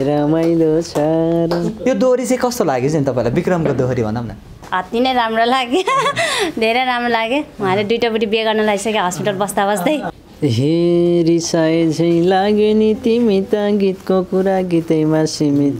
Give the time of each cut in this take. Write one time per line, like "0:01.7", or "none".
0:01.8
0:10.1